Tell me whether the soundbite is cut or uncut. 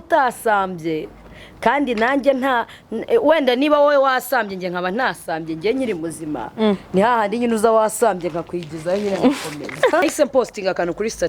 cut